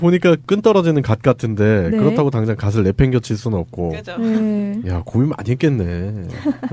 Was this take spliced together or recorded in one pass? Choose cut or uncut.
cut